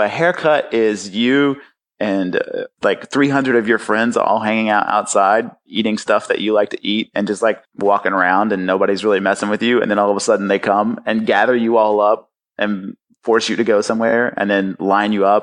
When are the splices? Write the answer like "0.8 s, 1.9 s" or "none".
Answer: 2.7 s, 7.7 s